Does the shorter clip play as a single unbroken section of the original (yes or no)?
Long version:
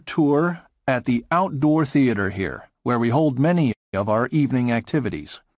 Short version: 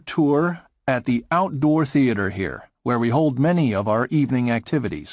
no